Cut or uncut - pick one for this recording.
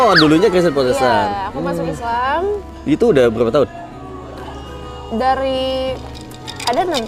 uncut